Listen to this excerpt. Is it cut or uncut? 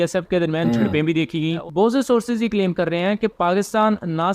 cut